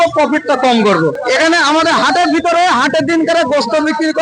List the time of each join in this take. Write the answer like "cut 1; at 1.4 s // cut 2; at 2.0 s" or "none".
cut 1; at 1.2 s